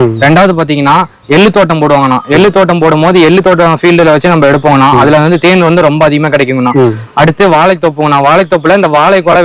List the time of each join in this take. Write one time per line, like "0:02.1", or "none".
none